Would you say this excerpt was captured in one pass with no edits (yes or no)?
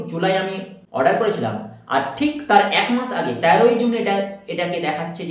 yes